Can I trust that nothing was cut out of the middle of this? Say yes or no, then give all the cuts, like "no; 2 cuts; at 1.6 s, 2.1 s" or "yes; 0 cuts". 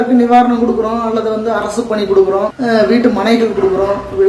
no; 1 cut; at 2.5 s